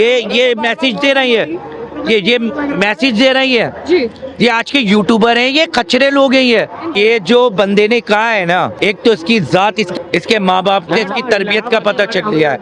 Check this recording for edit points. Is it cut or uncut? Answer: cut